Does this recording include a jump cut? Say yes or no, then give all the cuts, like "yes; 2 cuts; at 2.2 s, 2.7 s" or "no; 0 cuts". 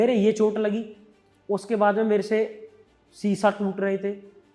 no; 0 cuts